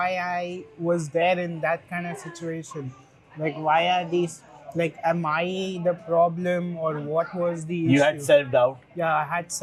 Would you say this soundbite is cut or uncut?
uncut